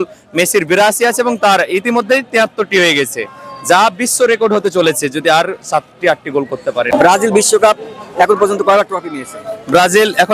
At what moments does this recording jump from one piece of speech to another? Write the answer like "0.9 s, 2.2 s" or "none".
6.9 s